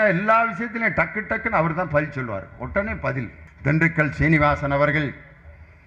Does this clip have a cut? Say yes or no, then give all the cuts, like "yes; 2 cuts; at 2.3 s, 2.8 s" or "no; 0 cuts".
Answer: yes; 1 cut; at 3.4 s